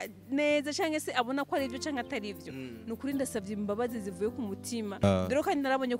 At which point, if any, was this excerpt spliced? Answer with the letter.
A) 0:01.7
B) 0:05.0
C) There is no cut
B